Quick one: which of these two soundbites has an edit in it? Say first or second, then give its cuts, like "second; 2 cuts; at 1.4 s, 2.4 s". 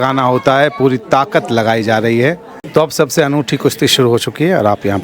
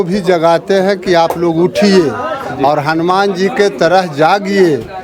first; 1 cut; at 2.5 s